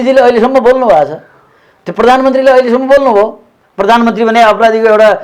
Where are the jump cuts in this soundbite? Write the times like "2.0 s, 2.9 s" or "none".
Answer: 3.5 s

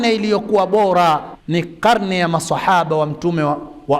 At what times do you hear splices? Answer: 1.3 s

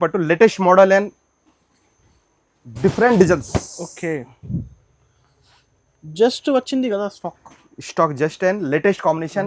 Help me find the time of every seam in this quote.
none

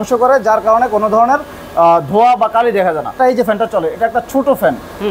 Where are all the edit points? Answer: 3.1 s

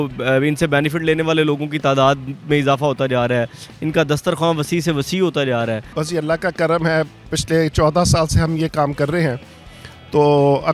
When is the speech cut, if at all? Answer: 5.9 s

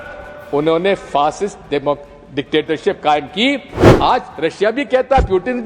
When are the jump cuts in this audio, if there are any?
3.8 s

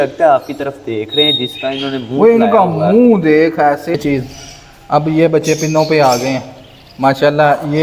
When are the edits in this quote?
4.0 s

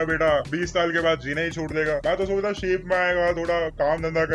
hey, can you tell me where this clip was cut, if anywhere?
none

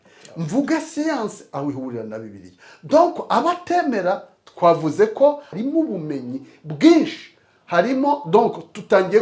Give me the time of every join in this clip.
5.5 s

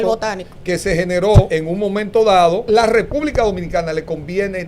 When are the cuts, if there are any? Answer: 1.5 s, 2.6 s

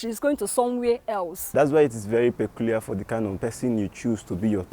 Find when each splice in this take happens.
1.4 s, 3.4 s

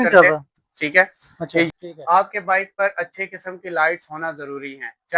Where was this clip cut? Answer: 1.7 s

